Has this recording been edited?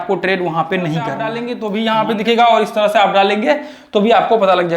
yes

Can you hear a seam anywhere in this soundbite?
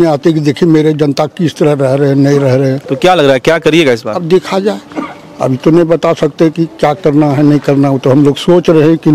no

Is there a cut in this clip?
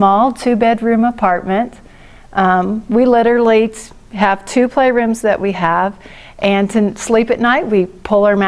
no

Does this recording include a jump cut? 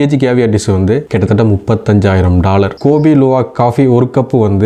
yes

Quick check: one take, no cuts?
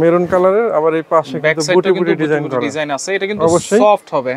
yes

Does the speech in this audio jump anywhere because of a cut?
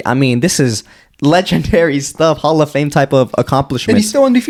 no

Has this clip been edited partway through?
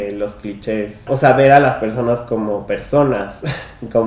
yes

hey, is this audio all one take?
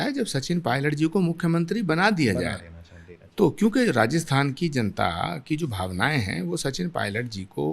yes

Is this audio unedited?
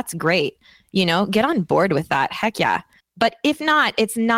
no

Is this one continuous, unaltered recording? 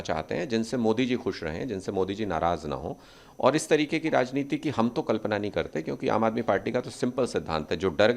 yes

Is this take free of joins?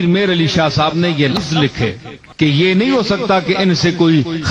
no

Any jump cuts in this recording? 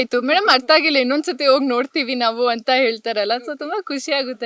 no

